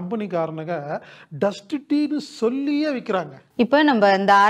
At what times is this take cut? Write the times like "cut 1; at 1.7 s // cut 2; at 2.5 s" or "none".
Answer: cut 1; at 3.4 s